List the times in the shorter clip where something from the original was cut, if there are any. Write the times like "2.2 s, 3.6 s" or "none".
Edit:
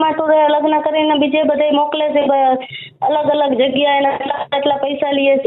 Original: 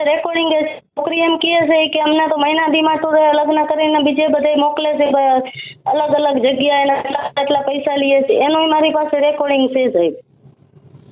none